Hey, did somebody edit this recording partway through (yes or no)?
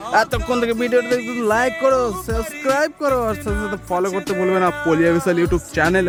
no